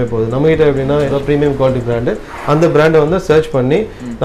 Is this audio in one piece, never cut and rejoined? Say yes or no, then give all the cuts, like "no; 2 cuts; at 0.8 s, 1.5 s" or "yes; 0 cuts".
no; 1 cut; at 1.1 s